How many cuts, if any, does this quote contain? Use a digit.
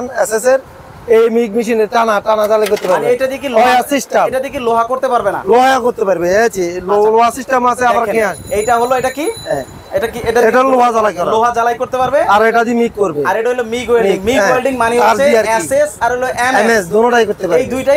0